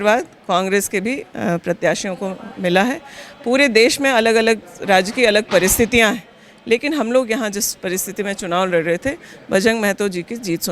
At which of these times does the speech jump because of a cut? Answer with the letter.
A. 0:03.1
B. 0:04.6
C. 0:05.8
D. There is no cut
D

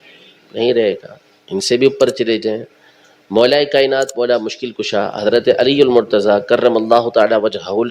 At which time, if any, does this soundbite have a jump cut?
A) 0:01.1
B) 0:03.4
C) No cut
C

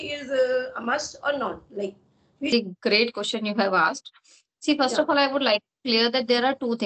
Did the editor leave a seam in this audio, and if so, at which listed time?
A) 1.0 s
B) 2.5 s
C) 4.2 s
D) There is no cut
B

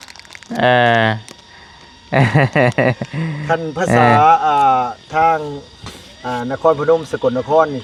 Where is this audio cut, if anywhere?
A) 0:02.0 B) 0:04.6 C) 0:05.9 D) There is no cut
D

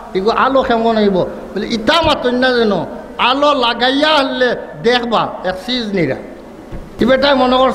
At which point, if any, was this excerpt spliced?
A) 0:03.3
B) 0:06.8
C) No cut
B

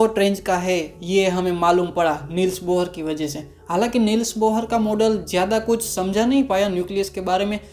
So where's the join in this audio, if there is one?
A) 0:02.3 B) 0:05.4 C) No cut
C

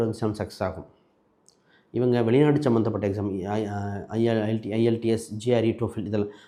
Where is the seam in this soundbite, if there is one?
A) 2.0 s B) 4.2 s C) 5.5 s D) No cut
D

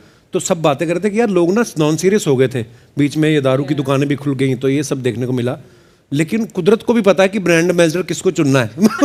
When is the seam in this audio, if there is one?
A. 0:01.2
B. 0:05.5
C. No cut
C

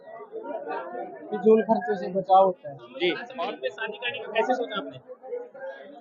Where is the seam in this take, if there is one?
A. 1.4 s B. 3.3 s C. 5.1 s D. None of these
B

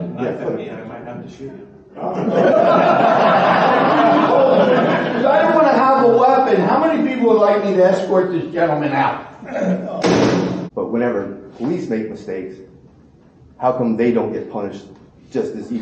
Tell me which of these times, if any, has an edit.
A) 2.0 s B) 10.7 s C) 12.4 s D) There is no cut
B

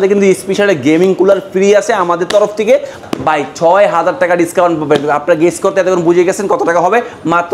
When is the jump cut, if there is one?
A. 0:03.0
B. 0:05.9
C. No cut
A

